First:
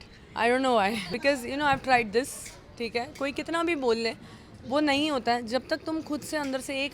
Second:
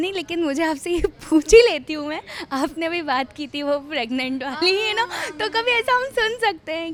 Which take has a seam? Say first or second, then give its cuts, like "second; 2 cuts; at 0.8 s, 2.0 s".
first; 1 cut; at 1.1 s